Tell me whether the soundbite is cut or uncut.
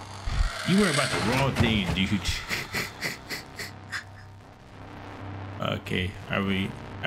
uncut